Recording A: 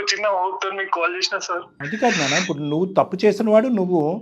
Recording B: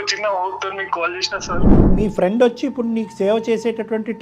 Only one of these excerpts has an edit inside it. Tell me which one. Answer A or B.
B